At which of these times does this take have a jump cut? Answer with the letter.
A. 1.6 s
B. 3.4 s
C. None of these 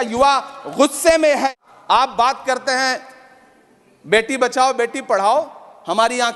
A